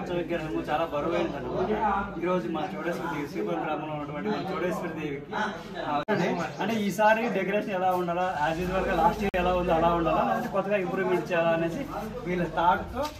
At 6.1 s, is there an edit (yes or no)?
yes